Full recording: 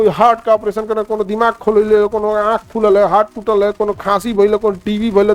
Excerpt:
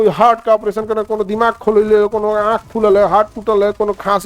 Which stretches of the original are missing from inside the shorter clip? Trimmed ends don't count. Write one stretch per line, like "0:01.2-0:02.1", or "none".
none